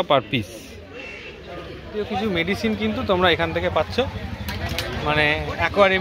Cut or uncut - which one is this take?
cut